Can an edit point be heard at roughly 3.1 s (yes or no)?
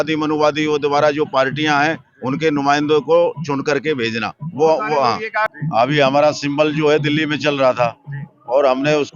no